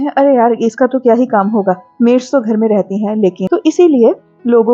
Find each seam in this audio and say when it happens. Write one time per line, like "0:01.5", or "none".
0:03.4